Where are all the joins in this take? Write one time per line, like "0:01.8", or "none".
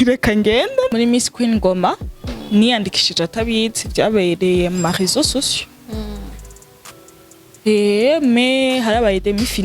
0:00.9